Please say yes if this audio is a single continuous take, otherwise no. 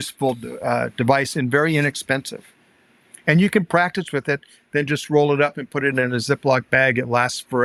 yes